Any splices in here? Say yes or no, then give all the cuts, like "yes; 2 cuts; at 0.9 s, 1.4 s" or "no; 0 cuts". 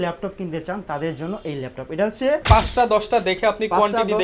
yes; 1 cut; at 2.4 s